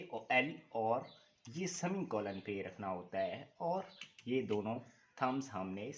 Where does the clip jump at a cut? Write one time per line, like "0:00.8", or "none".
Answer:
none